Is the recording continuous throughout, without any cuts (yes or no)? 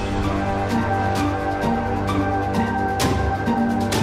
yes